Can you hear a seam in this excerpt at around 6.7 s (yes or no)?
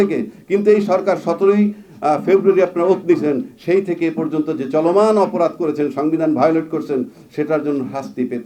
no